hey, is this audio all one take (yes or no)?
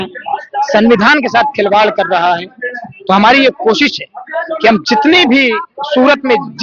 yes